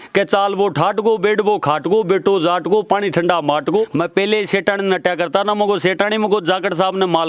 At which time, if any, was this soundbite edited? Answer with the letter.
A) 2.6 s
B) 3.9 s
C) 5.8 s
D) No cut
B